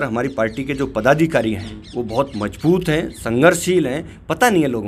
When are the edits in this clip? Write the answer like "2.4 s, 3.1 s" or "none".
none